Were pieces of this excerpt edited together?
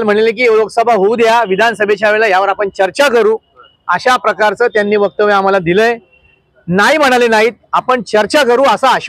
no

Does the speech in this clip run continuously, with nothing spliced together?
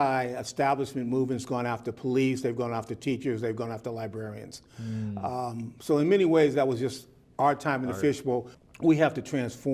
no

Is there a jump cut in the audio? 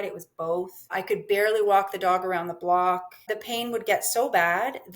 yes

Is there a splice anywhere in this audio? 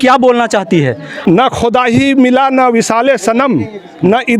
yes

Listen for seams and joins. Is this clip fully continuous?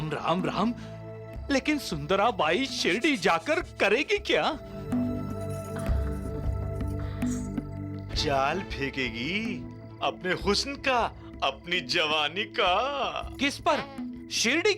yes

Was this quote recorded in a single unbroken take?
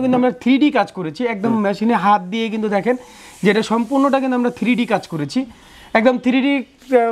yes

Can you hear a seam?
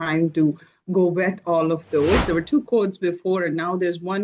yes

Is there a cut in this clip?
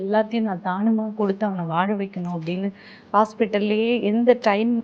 no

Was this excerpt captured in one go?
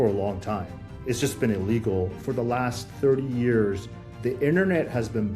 no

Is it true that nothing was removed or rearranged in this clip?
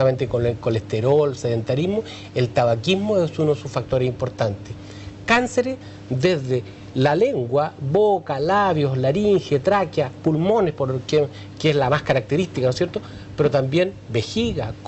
yes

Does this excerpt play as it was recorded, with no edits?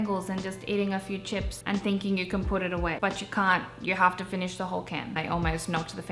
no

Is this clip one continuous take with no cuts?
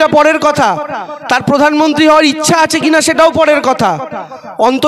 yes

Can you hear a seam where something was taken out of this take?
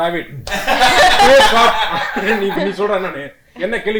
no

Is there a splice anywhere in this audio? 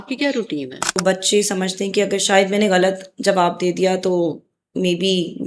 yes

